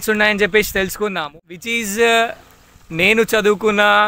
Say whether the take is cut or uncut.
cut